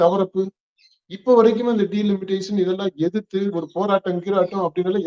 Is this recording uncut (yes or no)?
yes